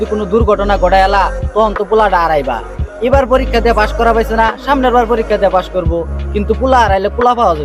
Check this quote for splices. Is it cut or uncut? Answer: uncut